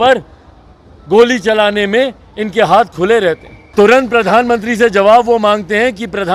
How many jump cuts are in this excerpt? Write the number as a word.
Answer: one